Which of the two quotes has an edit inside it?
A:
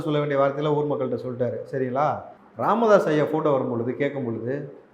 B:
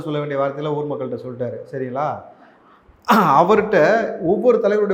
A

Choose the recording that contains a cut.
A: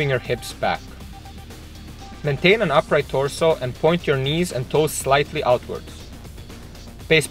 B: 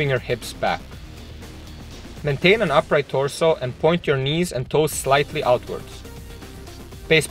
B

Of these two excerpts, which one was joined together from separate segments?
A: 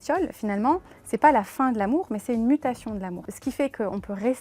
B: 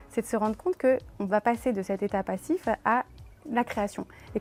A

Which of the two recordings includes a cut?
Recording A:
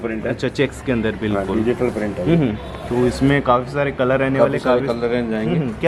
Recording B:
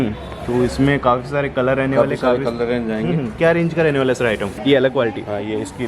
B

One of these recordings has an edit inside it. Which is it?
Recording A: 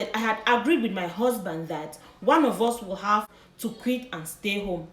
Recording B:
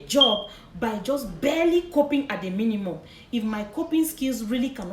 A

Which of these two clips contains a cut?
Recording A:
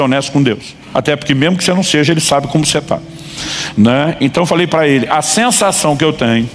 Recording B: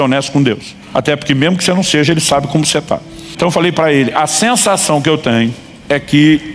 B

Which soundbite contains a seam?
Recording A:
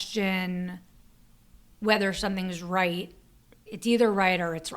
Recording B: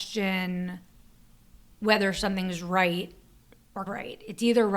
A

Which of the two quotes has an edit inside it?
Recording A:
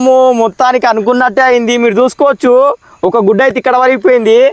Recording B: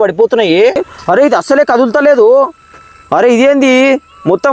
B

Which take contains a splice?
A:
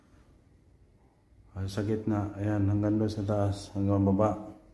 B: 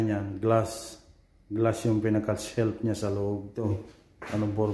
B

